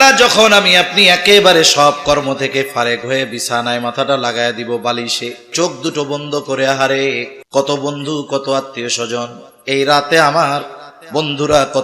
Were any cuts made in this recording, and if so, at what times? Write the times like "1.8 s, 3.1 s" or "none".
5.5 s, 7.3 s